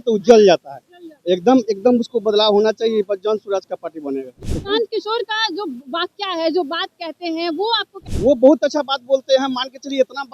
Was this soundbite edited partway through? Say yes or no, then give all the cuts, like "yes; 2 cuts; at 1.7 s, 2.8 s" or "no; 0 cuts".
yes; 2 cuts; at 4.4 s, 8.0 s